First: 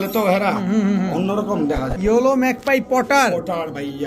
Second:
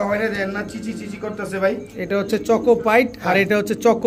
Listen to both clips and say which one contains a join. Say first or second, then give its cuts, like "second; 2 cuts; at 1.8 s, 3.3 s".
first; 1 cut; at 1.9 s